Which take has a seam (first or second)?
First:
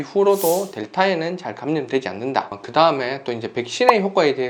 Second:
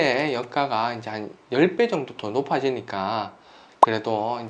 first